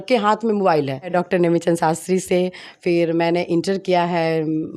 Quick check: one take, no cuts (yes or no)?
no